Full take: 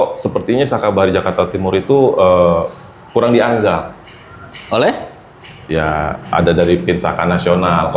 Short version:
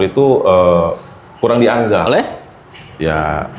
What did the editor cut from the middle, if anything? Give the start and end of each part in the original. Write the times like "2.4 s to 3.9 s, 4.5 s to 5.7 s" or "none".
3.8 s to 4.8 s

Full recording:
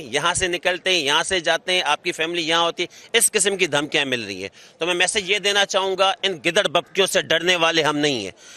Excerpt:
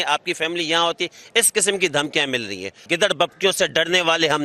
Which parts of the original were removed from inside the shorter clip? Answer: 4.6 s to 6.4 s

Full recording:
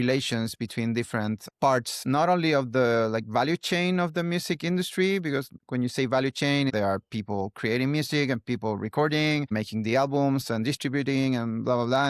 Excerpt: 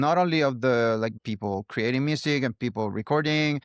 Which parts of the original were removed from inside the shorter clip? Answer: 3.3 s to 7.0 s

